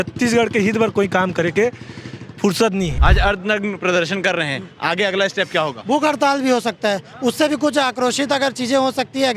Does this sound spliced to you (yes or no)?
yes